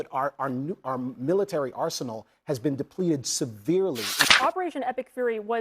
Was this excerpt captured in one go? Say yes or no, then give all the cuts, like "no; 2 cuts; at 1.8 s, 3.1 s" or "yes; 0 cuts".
no; 1 cut; at 4.2 s